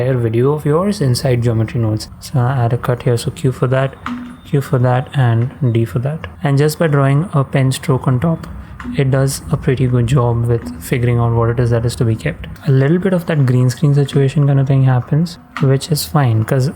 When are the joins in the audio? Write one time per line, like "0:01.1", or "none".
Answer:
0:02.1
0:06.3
0:12.5
0:15.4